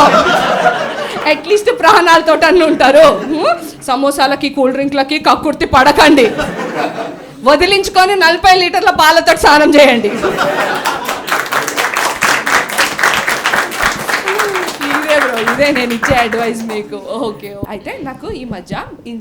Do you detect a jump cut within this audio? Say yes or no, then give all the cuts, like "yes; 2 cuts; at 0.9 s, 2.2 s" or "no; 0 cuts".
yes; 1 cut; at 17.7 s